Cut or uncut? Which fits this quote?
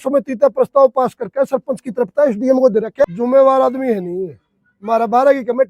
cut